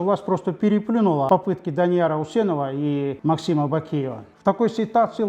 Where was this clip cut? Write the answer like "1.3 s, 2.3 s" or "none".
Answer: 1.3 s, 3.2 s, 4.2 s